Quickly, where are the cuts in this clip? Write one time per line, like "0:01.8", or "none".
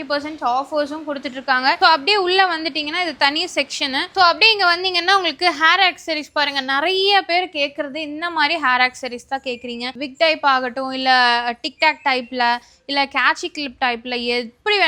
none